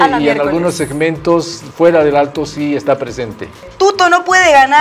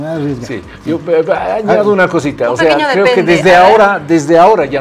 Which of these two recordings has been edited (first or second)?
first